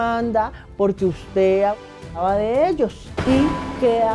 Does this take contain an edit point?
no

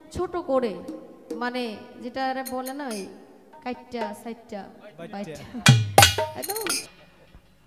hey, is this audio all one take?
no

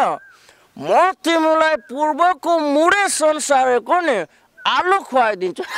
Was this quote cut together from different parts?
no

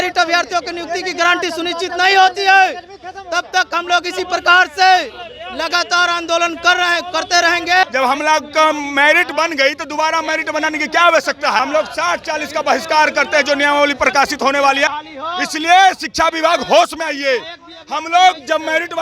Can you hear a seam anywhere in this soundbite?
yes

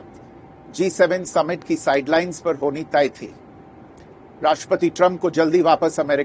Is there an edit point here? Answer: no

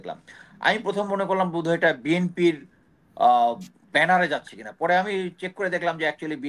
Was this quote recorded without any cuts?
yes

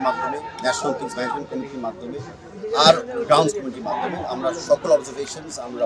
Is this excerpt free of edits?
yes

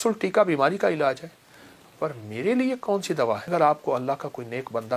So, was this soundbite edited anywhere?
yes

